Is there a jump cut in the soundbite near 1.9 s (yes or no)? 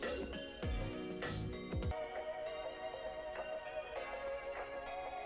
yes